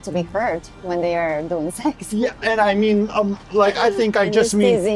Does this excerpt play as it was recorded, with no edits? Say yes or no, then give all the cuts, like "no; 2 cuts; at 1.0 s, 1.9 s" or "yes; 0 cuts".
yes; 0 cuts